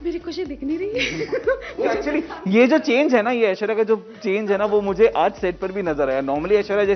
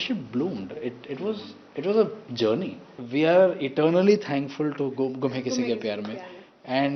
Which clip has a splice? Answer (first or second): second